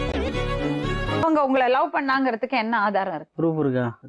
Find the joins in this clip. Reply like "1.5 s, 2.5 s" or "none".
1.2 s